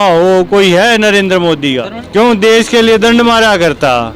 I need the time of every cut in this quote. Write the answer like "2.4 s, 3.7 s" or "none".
2.0 s